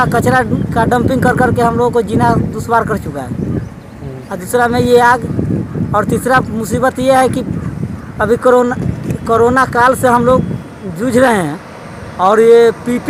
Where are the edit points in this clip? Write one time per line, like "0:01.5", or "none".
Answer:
none